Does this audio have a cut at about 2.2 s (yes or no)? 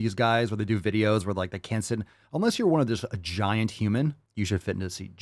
no